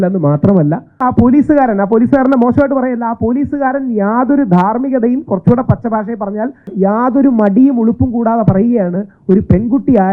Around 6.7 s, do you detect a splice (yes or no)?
yes